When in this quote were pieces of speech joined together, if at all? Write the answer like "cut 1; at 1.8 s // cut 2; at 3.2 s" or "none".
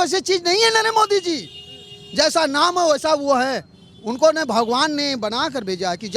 none